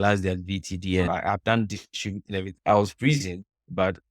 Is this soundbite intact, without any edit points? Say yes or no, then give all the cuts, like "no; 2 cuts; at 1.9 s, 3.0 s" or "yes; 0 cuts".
no; 2 cuts; at 1.1 s, 2.5 s